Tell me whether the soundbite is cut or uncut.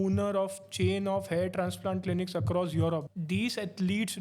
cut